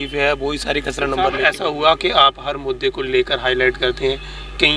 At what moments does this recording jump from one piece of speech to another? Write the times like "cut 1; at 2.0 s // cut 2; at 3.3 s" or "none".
cut 1; at 1.4 s